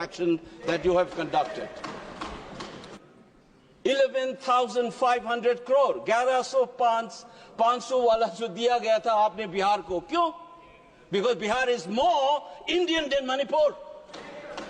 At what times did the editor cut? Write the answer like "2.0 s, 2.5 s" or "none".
2.8 s